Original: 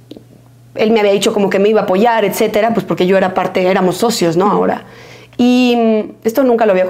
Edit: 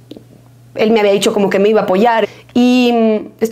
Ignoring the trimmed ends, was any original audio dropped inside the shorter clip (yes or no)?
yes